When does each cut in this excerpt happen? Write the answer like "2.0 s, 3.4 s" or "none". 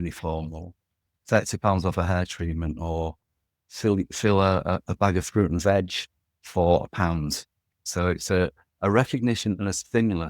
7.8 s